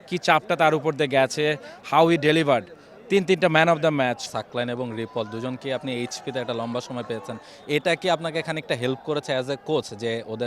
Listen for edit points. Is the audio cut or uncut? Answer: cut